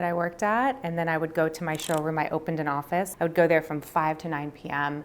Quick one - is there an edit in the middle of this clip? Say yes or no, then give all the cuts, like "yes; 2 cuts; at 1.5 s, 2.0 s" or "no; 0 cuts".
yes; 1 cut; at 3.1 s